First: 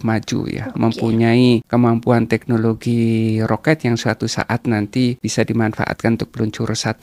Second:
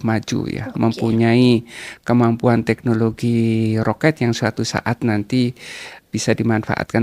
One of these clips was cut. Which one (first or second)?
first